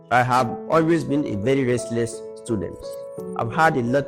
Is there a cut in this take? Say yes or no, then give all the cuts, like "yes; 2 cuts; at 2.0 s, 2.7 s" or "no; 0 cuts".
no; 0 cuts